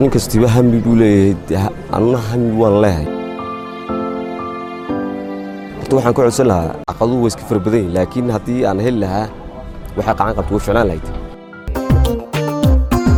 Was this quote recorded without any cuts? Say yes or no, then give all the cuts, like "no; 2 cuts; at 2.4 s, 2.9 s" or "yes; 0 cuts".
yes; 0 cuts